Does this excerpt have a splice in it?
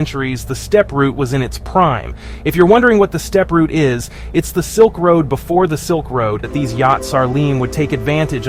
yes; 1 cut; at 6.5 s

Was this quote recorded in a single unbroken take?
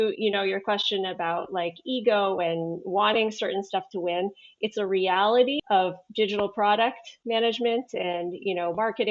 no; 1 cut; at 5.6 s

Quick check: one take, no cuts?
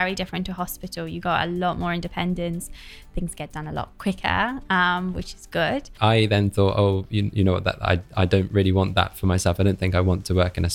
no; 1 cut; at 5.9 s

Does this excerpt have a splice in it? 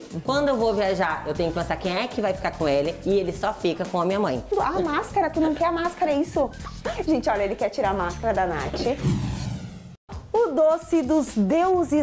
yes; 3 cuts; at 4.5 s, 6.6 s, 9.0 s

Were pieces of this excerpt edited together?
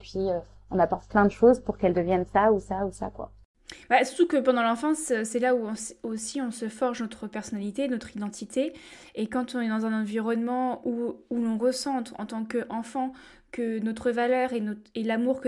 no; 0 cuts

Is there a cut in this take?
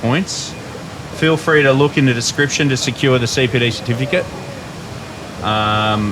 no; 0 cuts

